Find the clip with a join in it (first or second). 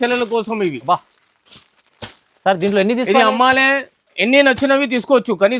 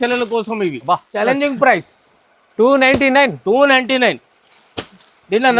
second